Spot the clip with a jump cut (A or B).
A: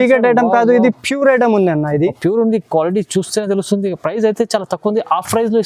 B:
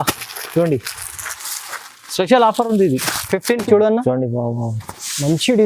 B